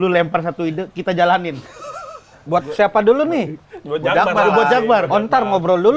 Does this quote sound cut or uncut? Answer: cut